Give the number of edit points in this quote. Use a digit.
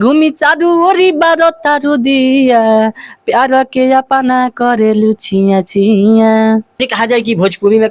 1